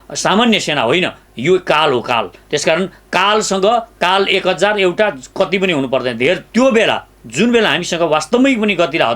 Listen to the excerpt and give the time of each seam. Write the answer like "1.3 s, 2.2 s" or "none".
6.4 s